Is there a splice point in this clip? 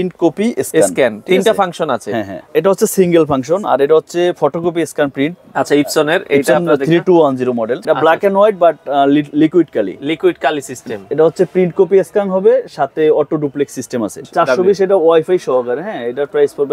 yes; 3 cuts; at 2.5 s, 7.8 s, 14.2 s

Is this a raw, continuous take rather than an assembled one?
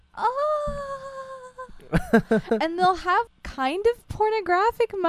no; 1 cut; at 3.3 s

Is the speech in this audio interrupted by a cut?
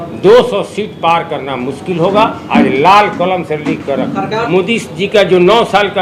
yes; 1 cut; at 4.5 s

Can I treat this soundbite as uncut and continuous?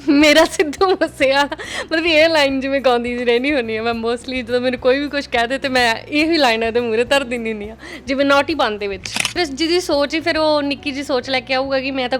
no; 1 cut; at 9.4 s

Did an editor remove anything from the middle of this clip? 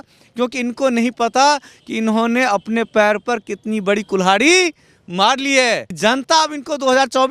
yes; 1 cut; at 5.9 s

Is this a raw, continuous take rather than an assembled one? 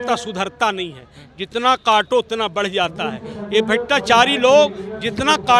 yes; 0 cuts

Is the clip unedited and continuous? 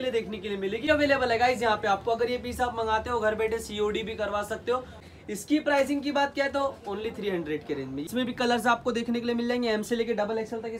no; 3 cuts; at 0.9 s, 5.1 s, 8.1 s

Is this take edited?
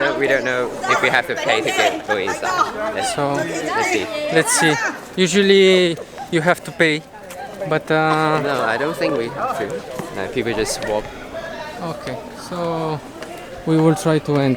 no; 0 cuts

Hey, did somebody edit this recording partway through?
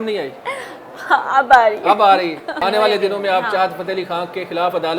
yes; 1 cut; at 2.5 s

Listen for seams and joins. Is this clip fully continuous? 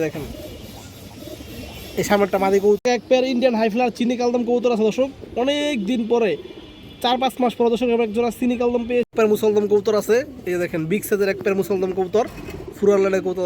no; 2 cuts; at 2.9 s, 9.1 s

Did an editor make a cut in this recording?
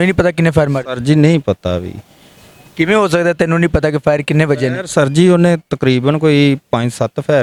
no; 0 cuts

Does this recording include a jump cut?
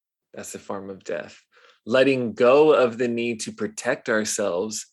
no; 0 cuts

